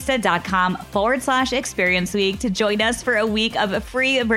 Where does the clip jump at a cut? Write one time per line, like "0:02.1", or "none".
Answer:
none